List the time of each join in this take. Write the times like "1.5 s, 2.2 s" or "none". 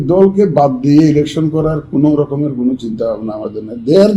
none